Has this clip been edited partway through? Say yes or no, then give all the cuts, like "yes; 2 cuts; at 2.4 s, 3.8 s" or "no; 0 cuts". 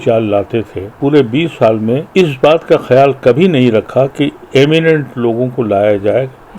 yes; 2 cuts; at 0.9 s, 2.1 s